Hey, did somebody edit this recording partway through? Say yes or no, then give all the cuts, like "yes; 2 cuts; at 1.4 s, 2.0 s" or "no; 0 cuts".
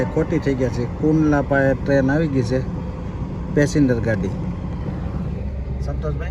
no; 0 cuts